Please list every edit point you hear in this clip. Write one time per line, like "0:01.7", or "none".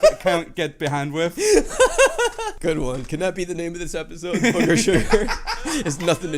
0:02.5